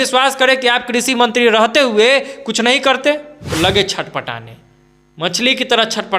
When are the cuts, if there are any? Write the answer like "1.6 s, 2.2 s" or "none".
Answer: 3.4 s